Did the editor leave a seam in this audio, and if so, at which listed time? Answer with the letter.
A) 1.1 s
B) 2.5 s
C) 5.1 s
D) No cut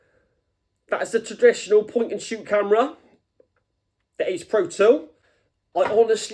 C